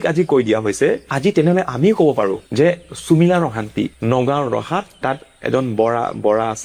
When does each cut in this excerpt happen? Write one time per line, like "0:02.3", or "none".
none

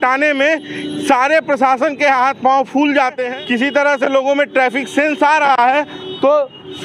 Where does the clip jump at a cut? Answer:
0:03.2

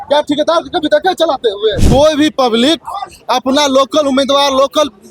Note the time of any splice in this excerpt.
0:01.8

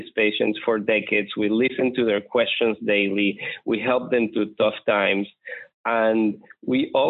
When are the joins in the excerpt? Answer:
none

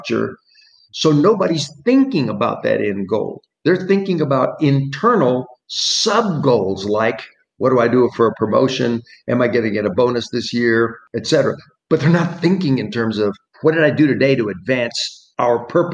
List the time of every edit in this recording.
0:11.1

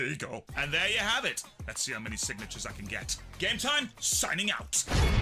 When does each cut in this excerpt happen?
0:02.8

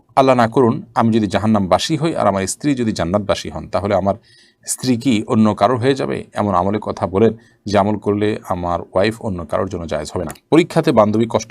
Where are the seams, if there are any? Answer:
0:10.3

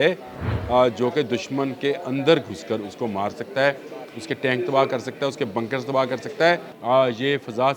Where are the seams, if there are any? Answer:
0:06.7

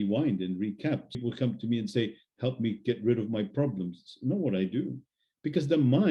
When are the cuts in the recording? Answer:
0:01.2

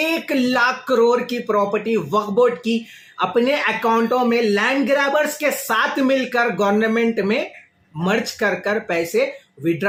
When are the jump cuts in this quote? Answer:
none

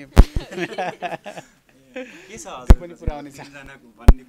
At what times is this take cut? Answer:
none

